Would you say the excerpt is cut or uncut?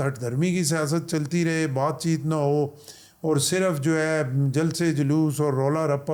uncut